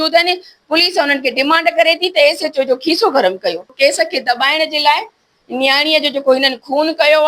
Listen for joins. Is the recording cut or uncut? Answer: cut